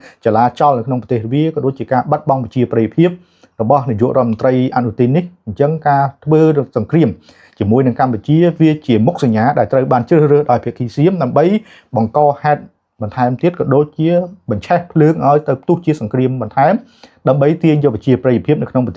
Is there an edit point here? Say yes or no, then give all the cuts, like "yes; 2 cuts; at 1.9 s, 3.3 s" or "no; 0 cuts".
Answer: no; 0 cuts